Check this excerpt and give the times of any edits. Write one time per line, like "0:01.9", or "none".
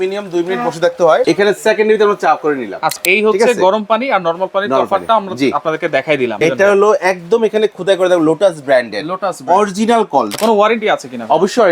0:01.2
0:03.0
0:06.4
0:10.3